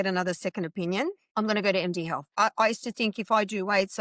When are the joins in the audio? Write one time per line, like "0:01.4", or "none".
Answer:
0:01.2
0:02.2